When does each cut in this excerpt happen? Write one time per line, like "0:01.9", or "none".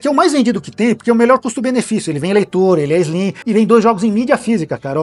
0:03.4